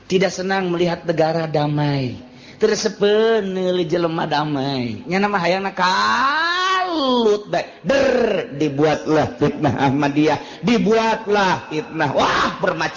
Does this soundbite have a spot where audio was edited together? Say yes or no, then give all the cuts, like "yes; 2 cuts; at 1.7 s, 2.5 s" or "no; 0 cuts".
no; 0 cuts